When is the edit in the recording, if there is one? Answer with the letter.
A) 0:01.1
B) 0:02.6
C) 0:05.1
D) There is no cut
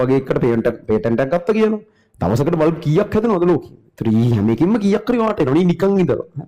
D